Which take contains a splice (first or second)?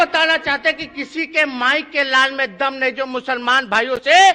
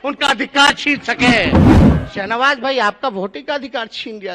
second